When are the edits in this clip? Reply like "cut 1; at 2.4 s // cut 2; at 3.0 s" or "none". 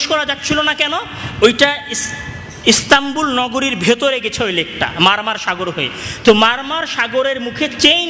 none

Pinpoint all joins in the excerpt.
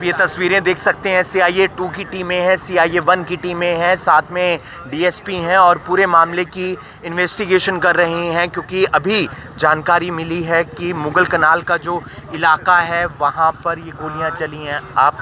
none

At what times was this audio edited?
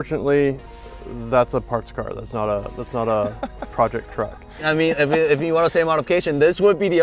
cut 1; at 4.6 s

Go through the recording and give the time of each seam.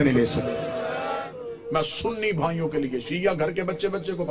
cut 1; at 1.2 s

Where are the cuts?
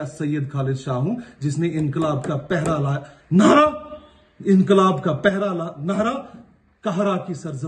none

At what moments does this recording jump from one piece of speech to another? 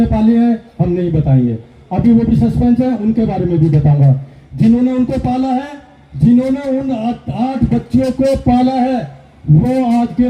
none

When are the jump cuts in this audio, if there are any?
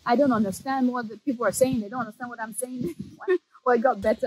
cut 1; at 3.1 s

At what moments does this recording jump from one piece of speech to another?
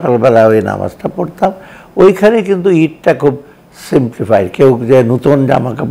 none

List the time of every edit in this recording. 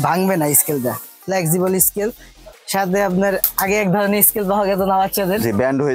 none

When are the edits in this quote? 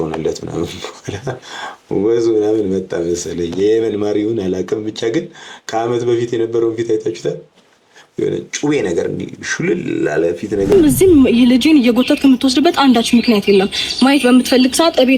cut 1; at 10.7 s

